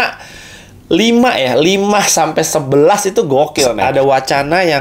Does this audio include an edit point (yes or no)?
yes